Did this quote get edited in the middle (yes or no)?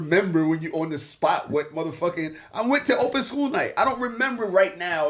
no